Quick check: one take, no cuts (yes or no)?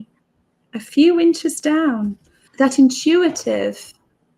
no